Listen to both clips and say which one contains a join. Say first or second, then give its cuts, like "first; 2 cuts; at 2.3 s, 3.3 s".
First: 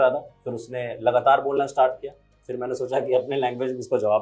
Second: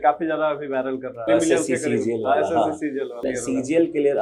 second; 2 cuts; at 1.1 s, 3.2 s